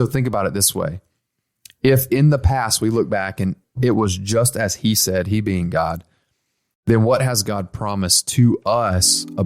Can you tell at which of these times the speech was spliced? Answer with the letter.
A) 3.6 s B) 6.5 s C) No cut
A